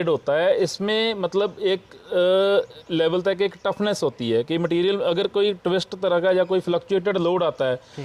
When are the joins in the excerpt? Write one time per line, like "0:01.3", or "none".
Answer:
none